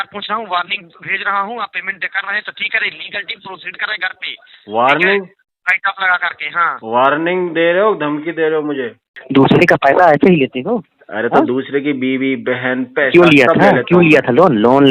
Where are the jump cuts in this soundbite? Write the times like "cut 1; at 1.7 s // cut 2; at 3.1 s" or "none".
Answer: cut 1; at 9.2 s

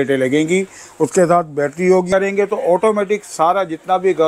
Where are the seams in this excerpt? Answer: cut 1; at 2.1 s

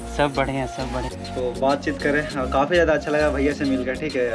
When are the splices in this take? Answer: cut 1; at 1.2 s

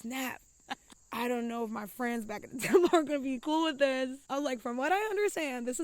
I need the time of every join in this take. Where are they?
cut 1; at 1.0 s // cut 2; at 4.2 s

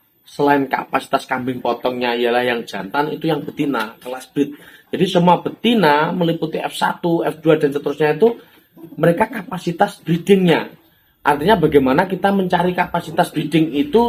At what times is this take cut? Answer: none

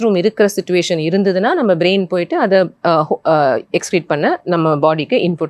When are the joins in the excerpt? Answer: none

